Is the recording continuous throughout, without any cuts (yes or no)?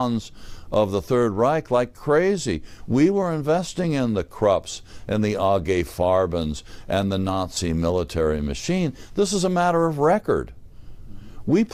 yes